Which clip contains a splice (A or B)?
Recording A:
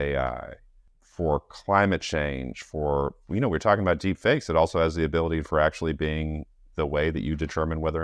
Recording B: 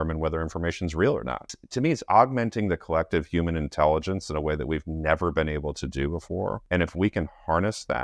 B